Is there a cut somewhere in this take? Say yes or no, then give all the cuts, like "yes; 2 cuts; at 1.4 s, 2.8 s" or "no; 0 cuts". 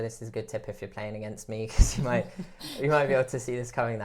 no; 0 cuts